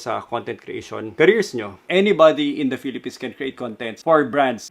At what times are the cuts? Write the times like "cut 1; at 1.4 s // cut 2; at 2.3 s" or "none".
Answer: cut 1; at 1.8 s